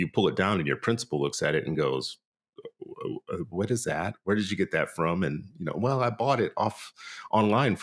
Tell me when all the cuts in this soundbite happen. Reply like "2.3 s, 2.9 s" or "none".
none